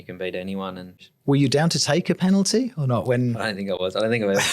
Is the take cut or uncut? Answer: cut